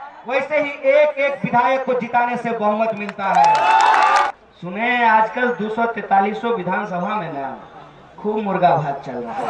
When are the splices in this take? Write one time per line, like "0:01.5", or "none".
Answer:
0:04.2

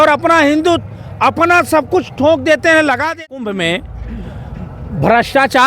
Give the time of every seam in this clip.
0:03.1

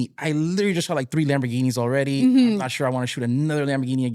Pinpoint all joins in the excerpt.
none

